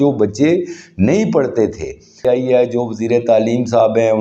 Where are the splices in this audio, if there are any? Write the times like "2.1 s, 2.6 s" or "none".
2.1 s